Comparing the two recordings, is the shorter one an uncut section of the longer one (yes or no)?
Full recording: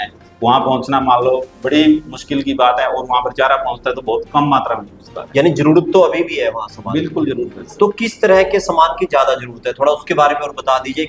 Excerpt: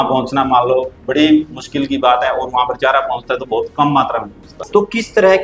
no